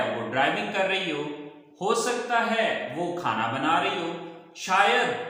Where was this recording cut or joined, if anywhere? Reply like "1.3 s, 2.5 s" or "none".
none